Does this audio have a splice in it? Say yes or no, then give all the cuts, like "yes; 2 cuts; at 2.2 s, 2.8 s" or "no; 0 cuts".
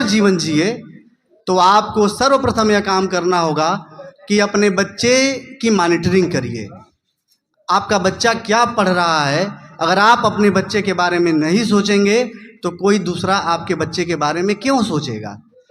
no; 0 cuts